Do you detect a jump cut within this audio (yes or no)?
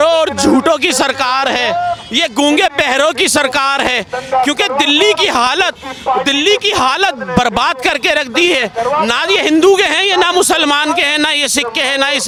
no